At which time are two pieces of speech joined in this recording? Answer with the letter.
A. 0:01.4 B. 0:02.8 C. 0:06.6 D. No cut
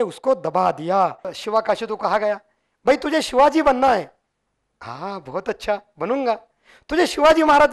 A